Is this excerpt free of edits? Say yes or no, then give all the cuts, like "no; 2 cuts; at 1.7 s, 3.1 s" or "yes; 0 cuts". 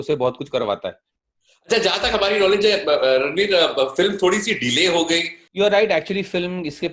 yes; 0 cuts